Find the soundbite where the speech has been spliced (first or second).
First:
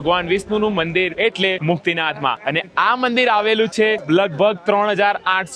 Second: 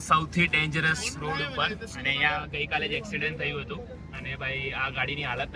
first